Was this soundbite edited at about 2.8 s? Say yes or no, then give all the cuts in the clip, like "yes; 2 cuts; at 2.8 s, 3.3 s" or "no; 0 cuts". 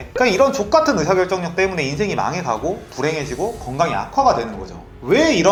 no; 0 cuts